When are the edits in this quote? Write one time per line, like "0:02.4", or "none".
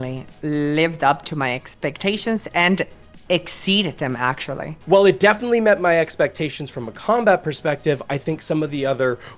0:04.8